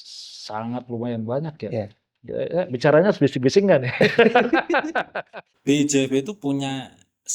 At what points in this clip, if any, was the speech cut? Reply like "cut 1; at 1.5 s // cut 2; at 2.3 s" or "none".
cut 1; at 5.5 s